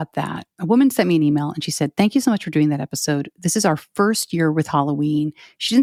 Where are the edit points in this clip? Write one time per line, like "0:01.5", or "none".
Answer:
none